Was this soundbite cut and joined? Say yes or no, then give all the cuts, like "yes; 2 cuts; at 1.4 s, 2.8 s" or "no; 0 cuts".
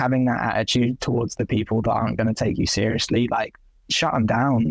no; 0 cuts